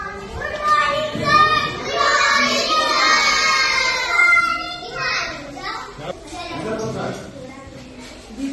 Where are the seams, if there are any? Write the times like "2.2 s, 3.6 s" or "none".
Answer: 6.1 s